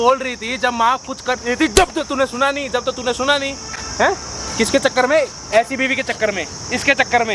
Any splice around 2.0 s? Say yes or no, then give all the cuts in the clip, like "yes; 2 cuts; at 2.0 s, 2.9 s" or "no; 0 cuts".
no; 0 cuts